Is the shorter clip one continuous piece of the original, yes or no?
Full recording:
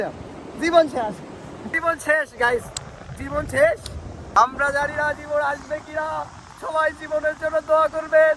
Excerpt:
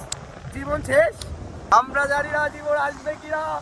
yes